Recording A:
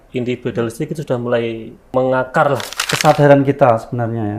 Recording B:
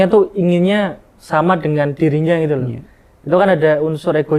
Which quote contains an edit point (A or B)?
A